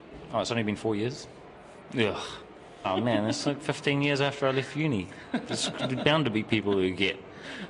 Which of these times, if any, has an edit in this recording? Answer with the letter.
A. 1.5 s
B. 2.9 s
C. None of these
B